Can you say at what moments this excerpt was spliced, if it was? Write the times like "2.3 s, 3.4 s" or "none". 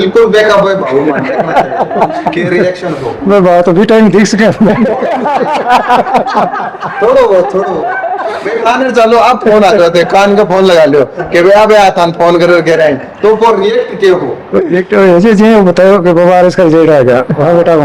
none